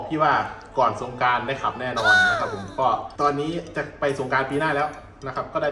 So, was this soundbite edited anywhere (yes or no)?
no